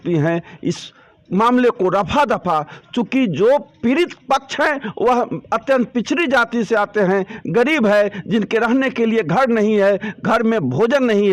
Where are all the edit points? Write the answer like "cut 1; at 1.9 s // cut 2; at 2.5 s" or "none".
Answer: none